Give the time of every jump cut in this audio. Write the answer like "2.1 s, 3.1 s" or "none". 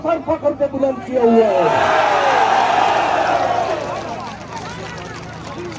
none